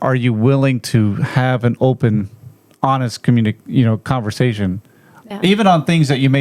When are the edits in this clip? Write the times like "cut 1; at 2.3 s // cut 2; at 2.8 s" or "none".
none